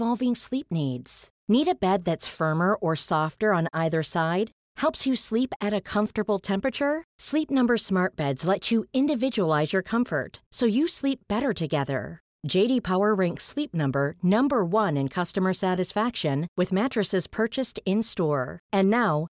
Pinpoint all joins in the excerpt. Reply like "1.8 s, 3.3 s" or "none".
none

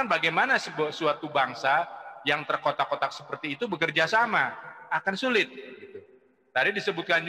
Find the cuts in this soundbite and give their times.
none

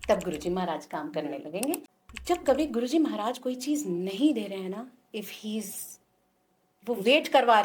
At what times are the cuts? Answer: 1.9 s

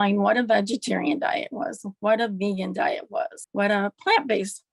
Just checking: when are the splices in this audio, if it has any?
3.4 s

